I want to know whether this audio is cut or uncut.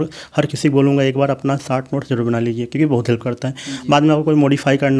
uncut